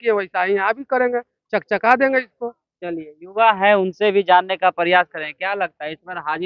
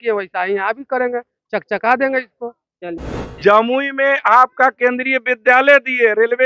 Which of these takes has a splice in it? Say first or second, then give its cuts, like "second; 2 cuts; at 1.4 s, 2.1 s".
second; 1 cut; at 3.3 s